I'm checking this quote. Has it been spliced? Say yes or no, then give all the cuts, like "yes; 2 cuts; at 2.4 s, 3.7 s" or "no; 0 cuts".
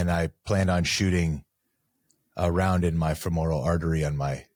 no; 0 cuts